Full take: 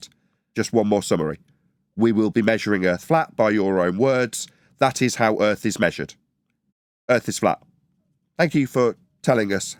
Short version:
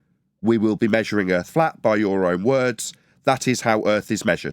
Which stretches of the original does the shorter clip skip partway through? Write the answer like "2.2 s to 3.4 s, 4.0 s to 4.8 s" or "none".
none